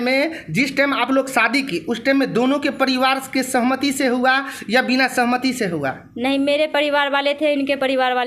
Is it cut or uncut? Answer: uncut